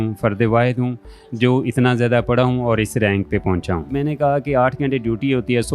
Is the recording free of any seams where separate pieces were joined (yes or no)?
no